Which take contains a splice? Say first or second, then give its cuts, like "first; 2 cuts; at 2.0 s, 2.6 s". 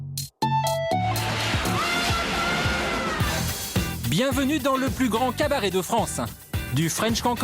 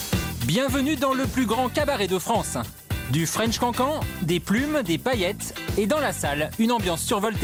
first; 1 cut; at 1.2 s